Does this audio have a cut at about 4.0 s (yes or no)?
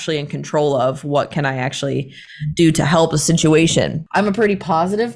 yes